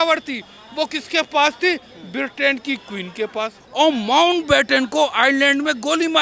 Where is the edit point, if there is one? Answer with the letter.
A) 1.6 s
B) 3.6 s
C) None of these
B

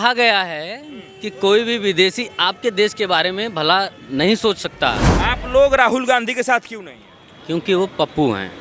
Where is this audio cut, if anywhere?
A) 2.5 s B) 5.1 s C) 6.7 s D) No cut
B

